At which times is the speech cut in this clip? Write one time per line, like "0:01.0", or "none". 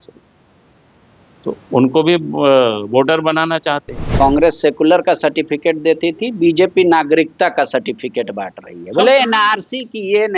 0:04.1